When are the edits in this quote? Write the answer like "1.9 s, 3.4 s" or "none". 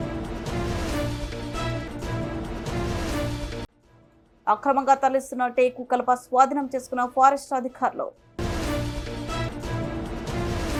none